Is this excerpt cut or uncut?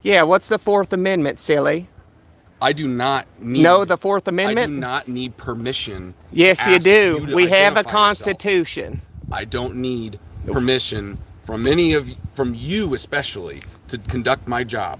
uncut